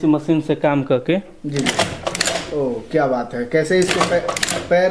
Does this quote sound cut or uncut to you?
uncut